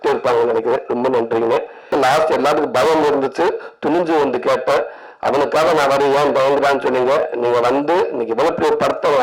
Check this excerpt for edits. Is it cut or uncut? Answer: cut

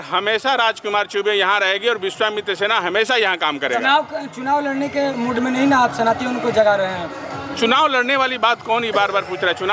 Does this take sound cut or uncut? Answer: uncut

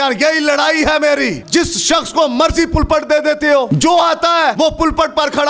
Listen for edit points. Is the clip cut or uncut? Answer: cut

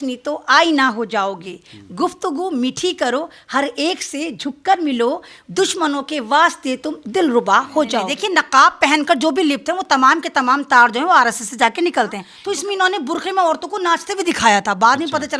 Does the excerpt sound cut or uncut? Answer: cut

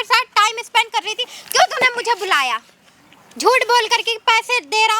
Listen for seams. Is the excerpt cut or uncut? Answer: uncut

